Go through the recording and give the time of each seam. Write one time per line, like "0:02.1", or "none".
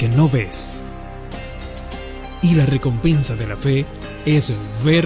none

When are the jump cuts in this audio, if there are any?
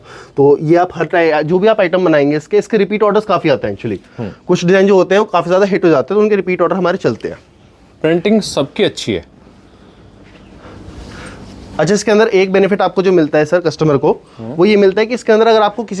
none

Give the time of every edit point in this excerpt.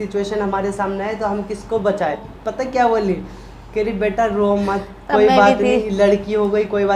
0:02.2
0:05.9

